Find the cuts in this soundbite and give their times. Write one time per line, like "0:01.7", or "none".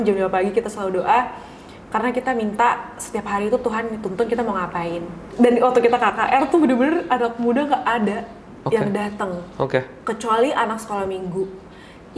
0:05.3